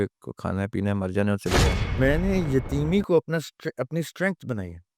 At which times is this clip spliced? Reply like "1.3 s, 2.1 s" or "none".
1.8 s